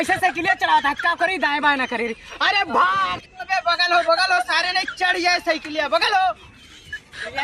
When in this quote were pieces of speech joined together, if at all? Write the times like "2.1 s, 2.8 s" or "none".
none